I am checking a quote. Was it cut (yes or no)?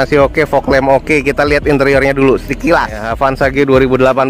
yes